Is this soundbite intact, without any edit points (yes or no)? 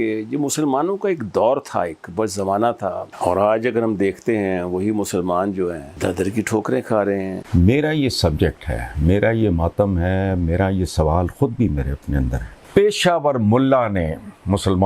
no